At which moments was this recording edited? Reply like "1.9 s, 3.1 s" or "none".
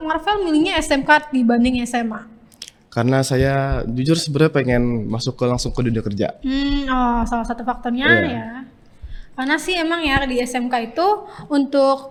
none